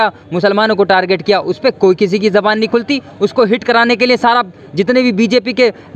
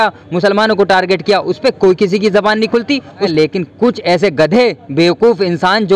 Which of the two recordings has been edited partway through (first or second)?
second